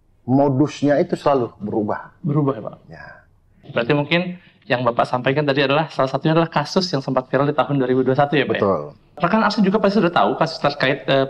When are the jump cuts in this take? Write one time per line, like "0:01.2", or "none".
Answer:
0:03.5
0:09.2